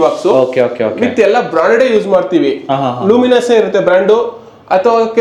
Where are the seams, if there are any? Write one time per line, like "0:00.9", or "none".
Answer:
none